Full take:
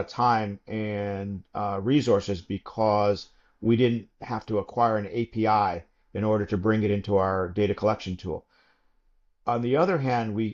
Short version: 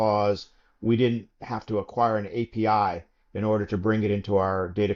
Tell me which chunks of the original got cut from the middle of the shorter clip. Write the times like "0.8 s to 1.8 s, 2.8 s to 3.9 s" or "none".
none